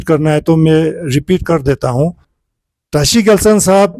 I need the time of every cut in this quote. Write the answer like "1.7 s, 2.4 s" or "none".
2.3 s

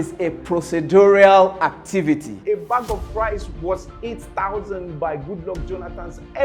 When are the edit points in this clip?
2.3 s

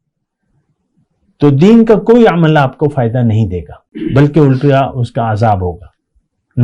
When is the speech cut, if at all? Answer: 3.8 s

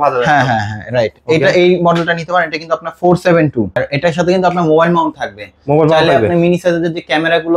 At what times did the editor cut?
3.8 s

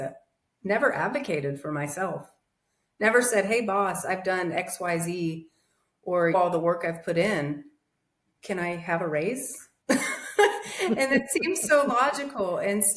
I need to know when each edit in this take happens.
none

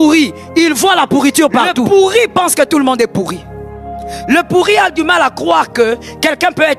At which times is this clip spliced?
1.9 s

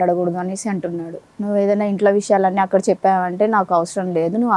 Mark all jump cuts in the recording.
1.2 s

